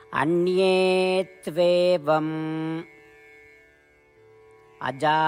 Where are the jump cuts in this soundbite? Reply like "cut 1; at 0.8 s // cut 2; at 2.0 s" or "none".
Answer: none